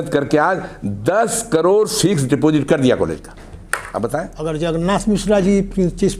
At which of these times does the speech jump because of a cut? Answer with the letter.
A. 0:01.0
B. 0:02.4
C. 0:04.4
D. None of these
C